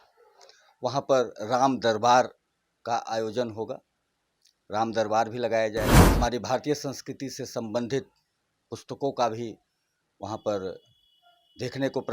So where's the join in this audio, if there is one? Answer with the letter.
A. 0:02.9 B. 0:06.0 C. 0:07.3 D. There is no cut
B